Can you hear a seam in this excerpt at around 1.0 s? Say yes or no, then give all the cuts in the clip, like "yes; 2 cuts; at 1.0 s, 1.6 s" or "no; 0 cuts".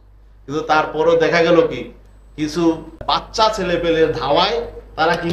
no; 1 cut; at 3.0 s